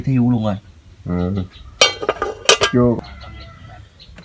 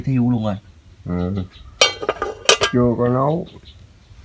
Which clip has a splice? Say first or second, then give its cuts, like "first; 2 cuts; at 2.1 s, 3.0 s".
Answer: first; 1 cut; at 3.0 s